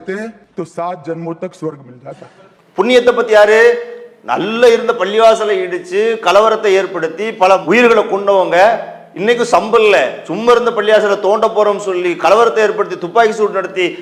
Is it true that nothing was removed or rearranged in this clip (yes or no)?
yes